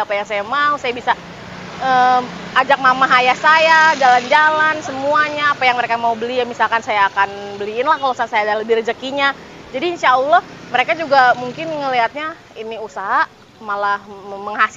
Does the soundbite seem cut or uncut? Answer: uncut